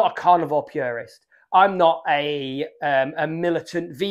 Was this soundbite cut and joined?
no; 0 cuts

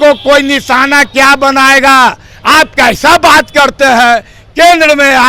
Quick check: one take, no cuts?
yes; 0 cuts

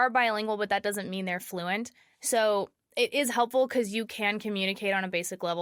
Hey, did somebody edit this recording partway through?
no; 0 cuts

